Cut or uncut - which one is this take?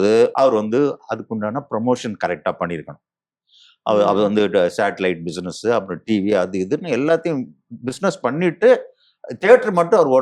uncut